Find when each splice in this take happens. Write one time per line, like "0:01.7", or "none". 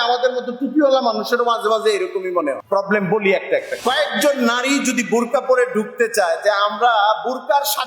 0:02.6
0:03.7